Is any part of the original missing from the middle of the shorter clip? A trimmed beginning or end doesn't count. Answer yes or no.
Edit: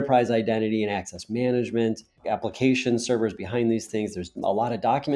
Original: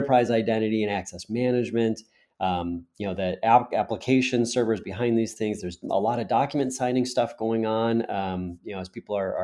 yes